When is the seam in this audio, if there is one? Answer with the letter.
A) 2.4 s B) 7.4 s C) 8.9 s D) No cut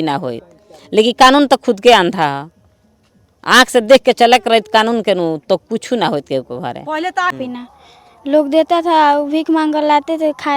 B